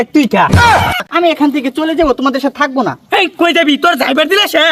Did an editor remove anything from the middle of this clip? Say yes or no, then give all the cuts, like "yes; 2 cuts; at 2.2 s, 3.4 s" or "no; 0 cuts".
yes; 1 cut; at 1.1 s